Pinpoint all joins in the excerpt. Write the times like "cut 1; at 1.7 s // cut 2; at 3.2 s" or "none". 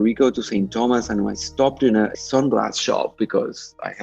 cut 1; at 2.1 s